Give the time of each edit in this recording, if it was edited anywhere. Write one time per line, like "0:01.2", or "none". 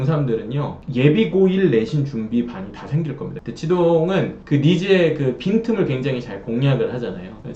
0:03.3